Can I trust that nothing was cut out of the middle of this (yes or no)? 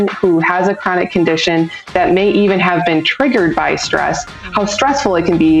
yes